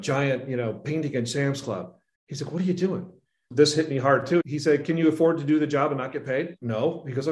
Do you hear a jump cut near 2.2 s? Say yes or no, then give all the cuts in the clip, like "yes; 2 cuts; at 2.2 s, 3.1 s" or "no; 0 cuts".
no; 2 cuts; at 3.4 s, 4.4 s